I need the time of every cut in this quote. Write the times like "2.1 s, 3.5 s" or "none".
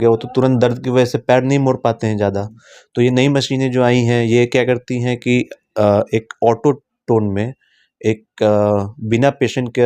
none